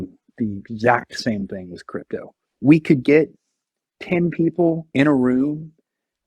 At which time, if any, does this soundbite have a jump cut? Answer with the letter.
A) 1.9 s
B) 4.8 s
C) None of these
B